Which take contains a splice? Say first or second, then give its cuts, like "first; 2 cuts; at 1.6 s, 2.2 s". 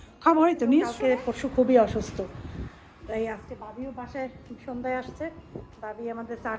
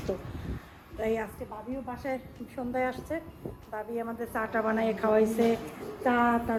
first; 1 cut; at 0.9 s